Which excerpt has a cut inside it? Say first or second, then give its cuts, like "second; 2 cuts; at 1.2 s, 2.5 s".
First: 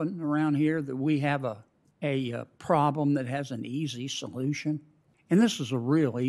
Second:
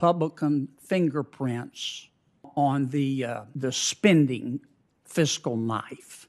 second; 1 cut; at 2.5 s